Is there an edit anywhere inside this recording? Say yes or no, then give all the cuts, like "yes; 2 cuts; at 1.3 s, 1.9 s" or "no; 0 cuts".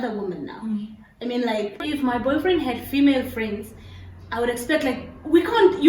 yes; 1 cut; at 1.8 s